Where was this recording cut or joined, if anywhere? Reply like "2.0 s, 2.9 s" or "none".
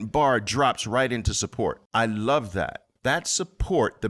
1.8 s, 2.8 s

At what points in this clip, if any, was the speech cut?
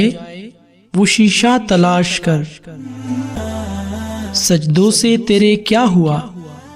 3.3 s

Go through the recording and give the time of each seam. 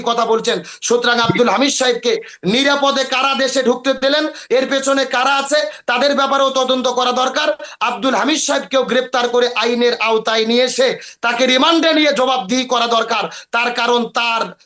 none

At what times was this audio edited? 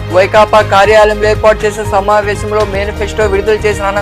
none

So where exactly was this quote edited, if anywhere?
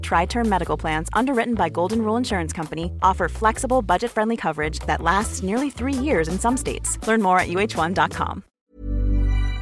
8.5 s

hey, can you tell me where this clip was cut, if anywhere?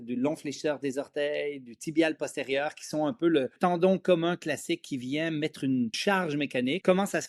3.6 s, 6.5 s

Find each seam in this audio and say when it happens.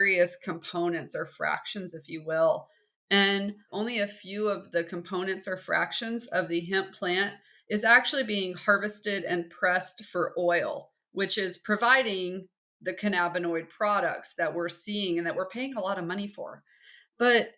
3.7 s

